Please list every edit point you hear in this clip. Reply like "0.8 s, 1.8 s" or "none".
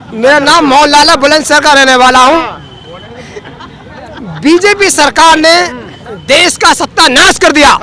none